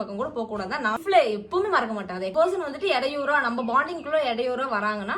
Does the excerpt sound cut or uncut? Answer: cut